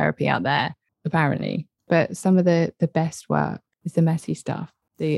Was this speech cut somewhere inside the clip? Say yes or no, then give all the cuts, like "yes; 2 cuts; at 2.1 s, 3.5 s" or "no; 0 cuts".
yes; 1 cut; at 1.9 s